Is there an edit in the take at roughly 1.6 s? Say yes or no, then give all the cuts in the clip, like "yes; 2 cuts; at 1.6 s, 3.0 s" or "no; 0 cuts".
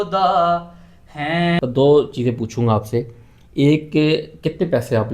yes; 1 cut; at 1.6 s